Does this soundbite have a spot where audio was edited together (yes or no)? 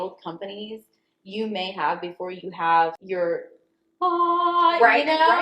yes